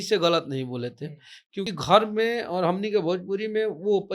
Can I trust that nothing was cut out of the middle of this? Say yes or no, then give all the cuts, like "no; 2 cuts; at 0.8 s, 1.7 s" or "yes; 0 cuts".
no; 1 cut; at 1.7 s